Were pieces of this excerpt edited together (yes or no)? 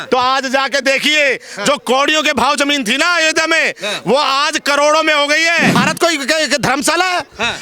yes